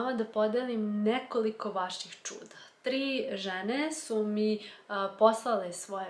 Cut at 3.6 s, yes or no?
no